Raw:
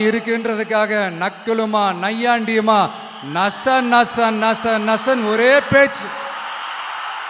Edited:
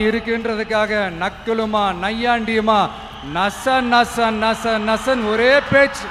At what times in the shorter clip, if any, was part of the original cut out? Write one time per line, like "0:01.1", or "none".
none